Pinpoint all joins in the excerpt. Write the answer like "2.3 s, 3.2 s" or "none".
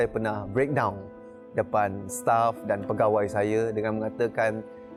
none